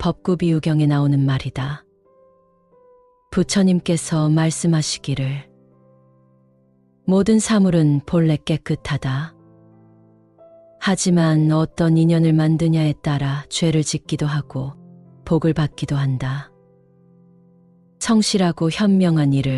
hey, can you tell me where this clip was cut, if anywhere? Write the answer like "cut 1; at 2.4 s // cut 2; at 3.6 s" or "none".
none